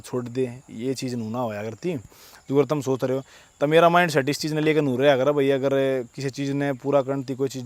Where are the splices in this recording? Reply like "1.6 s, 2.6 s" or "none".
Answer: none